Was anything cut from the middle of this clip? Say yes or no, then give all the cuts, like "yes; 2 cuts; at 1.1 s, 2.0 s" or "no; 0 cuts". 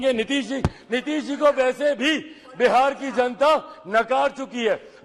no; 0 cuts